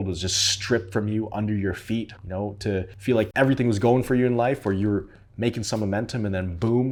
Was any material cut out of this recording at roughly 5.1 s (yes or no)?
no